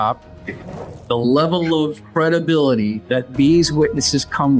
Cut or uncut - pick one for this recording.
cut